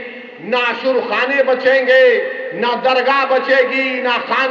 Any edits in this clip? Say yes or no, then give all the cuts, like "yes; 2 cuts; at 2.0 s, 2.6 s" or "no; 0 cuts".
no; 0 cuts